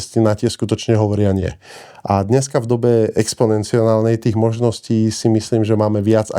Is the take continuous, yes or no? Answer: yes